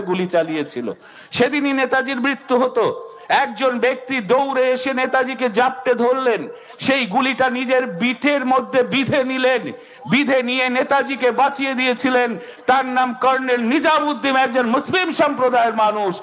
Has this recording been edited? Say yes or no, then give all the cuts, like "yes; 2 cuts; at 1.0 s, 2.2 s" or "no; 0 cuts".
no; 0 cuts